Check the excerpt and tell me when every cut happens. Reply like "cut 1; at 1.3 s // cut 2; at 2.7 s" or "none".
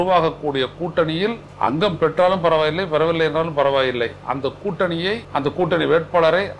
cut 1; at 1.5 s // cut 2; at 5.2 s

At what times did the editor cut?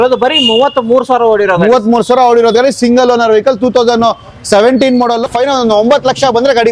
cut 1; at 5.2 s

